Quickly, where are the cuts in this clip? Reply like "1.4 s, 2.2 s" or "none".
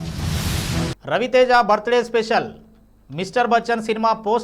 1.0 s